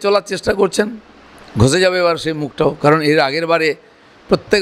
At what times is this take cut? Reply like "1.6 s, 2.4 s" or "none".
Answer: none